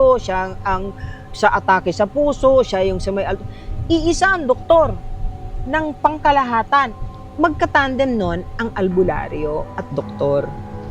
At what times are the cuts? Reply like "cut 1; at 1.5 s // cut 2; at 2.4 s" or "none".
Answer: cut 1; at 6.9 s